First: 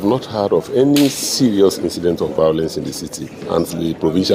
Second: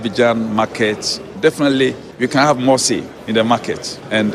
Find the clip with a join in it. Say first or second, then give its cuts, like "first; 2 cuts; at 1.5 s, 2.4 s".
second; 1 cut; at 3.1 s